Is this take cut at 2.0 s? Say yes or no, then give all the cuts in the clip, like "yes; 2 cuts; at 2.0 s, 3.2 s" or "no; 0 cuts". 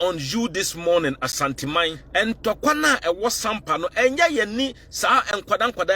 yes; 1 cut; at 2.0 s